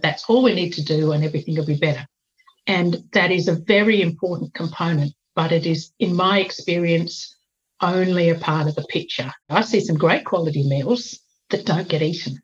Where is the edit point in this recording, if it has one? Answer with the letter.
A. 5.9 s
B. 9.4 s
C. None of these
B